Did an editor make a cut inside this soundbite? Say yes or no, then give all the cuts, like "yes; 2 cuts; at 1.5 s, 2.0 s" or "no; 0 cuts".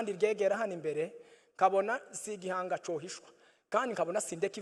no; 0 cuts